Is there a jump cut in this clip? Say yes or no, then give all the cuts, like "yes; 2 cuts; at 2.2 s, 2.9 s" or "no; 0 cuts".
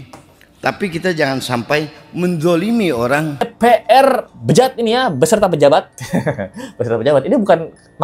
yes; 1 cut; at 3.5 s